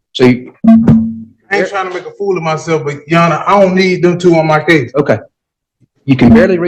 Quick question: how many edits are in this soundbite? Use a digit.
0